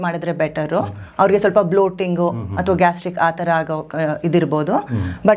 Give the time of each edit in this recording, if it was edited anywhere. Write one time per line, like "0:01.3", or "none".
none